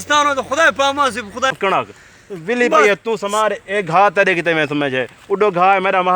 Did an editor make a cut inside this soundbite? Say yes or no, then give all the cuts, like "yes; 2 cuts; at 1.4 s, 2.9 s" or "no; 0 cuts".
yes; 1 cut; at 1.6 s